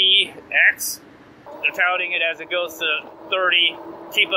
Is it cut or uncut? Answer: cut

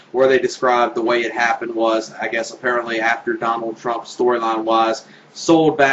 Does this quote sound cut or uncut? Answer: uncut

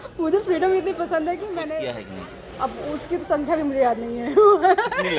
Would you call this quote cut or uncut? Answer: cut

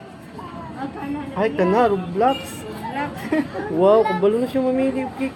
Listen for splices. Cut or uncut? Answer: uncut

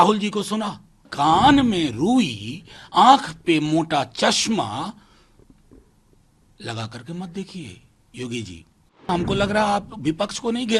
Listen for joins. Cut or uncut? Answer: cut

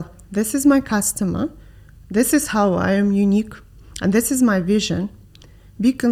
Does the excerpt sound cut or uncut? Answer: uncut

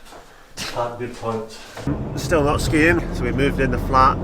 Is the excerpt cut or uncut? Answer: cut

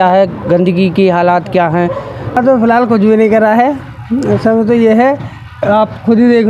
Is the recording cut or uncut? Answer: cut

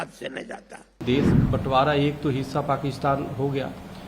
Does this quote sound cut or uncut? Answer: cut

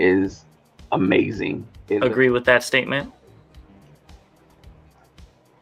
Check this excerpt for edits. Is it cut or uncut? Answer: cut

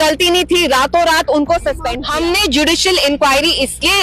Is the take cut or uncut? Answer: cut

